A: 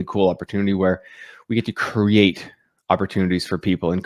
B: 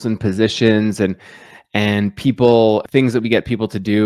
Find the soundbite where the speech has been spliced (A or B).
B